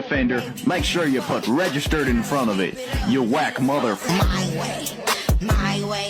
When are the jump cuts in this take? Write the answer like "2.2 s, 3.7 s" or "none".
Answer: none